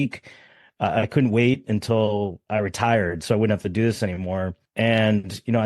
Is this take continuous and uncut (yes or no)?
no